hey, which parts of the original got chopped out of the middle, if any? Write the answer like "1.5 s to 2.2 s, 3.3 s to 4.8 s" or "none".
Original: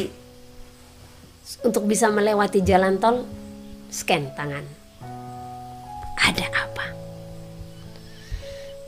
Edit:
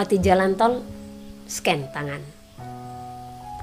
none